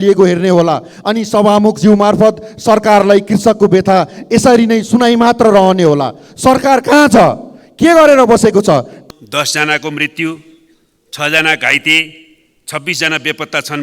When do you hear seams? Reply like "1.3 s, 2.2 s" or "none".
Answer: 8.9 s